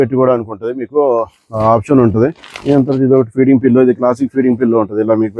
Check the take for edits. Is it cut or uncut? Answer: uncut